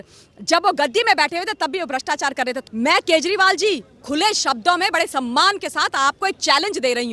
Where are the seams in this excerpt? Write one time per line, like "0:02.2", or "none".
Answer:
0:02.6